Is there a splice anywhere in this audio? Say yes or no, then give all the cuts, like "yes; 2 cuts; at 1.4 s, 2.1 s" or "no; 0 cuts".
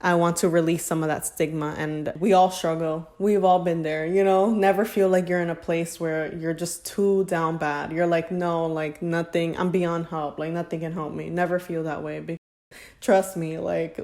yes; 1 cut; at 2.2 s